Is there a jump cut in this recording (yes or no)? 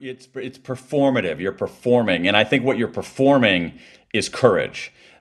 no